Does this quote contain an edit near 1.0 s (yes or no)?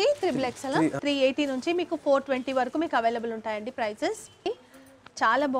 yes